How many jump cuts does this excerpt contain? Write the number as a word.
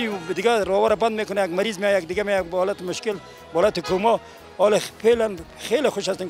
zero